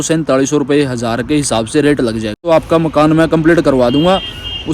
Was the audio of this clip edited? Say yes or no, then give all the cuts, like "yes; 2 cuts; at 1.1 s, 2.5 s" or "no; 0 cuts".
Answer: yes; 1 cut; at 2.4 s